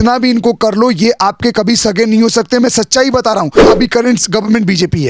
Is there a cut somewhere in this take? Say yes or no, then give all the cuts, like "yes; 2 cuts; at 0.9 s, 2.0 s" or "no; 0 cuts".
yes; 1 cut; at 3.7 s